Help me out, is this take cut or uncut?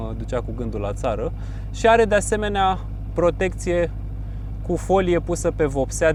uncut